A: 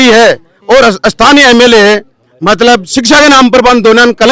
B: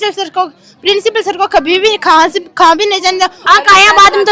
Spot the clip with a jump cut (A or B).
B